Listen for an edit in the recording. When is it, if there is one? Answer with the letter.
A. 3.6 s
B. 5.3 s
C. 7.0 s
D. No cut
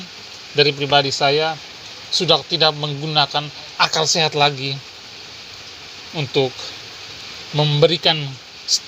A